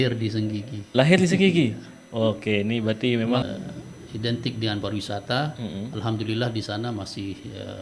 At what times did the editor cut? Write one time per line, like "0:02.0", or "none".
0:03.4